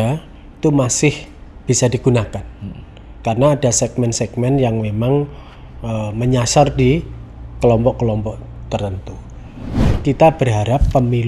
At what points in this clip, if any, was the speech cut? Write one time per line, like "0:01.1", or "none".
0:09.7